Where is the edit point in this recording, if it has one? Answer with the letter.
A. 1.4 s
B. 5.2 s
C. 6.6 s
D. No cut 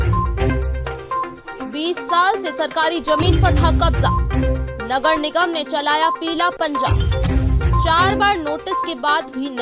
A